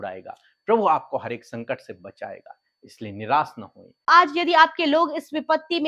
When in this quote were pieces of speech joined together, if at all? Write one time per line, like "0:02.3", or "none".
0:04.1

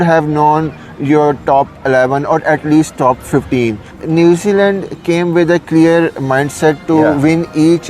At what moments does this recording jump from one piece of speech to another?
0:03.9

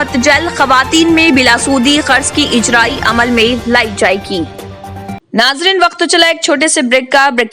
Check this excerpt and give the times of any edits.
0:05.2

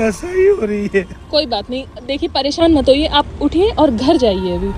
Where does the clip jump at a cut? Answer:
none

